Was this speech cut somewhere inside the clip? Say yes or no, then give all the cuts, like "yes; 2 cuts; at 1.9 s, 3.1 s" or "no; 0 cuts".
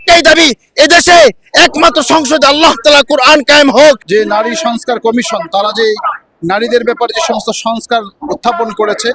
yes; 1 cut; at 4.0 s